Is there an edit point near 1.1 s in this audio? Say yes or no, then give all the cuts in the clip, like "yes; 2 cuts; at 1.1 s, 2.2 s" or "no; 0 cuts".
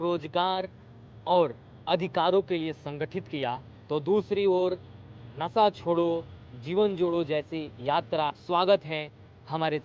no; 1 cut; at 8.4 s